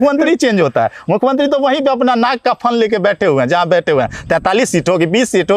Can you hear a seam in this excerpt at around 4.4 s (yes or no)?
no